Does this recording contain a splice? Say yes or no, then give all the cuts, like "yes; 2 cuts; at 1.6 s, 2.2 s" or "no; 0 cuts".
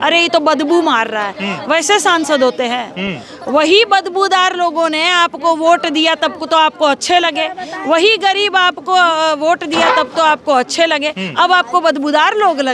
no; 0 cuts